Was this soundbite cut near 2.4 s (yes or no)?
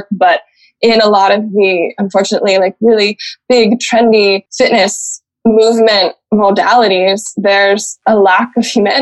no